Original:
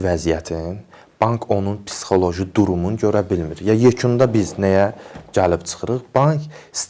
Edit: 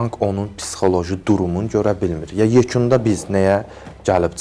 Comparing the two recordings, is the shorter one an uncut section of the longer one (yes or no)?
yes